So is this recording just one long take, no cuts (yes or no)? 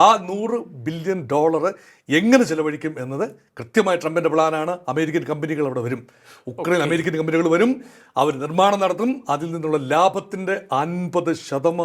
yes